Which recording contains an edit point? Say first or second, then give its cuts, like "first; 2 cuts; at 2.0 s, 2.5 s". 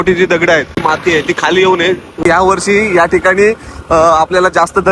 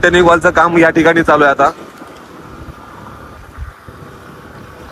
first; 2 cuts; at 0.8 s, 2.2 s